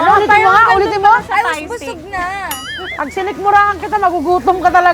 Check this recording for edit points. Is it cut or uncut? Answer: uncut